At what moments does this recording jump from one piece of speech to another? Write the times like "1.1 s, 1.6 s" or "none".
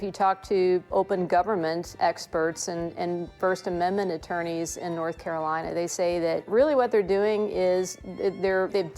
0.9 s